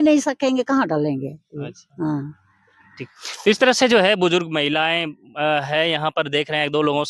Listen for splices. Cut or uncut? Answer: uncut